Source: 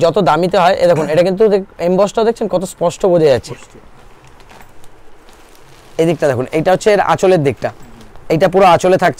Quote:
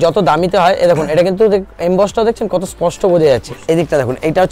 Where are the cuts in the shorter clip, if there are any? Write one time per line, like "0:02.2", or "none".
0:03.5